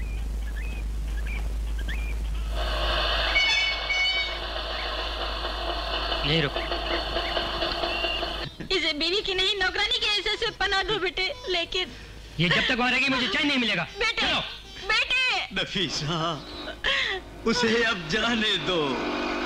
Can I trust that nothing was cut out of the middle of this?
yes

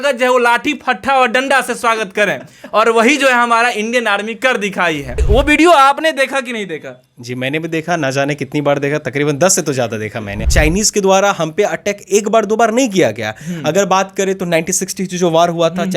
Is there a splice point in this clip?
yes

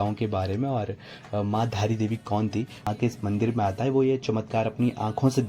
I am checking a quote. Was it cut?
yes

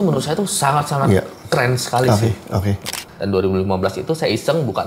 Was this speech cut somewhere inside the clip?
yes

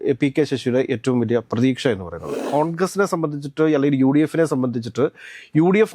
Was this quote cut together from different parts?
yes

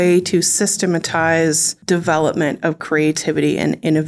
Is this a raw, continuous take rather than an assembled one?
no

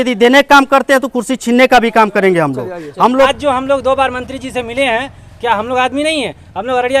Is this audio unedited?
no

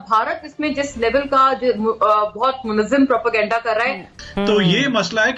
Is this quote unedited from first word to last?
no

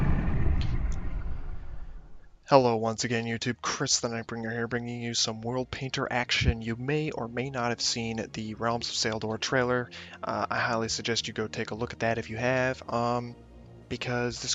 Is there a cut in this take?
no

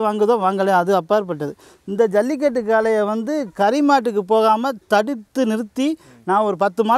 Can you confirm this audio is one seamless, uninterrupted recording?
yes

